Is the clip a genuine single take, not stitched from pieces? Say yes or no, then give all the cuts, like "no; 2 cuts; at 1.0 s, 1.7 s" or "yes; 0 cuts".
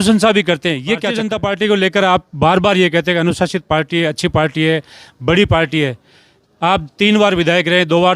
no; 1 cut; at 1.1 s